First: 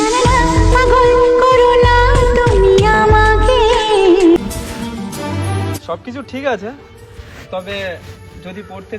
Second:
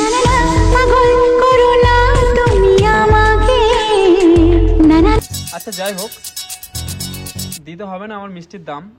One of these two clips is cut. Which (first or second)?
first